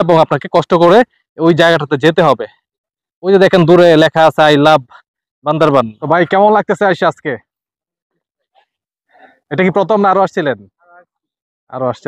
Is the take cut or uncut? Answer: cut